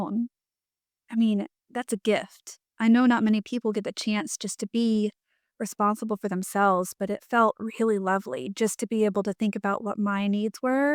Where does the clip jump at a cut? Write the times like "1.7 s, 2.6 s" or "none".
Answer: none